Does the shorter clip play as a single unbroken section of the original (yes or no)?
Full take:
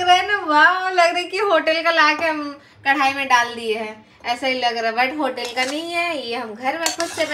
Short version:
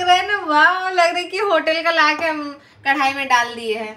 yes